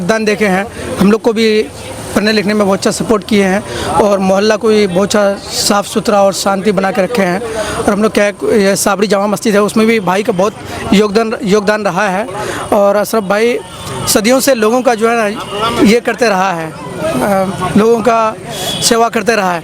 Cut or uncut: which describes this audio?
uncut